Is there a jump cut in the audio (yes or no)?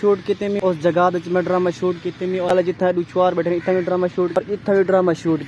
yes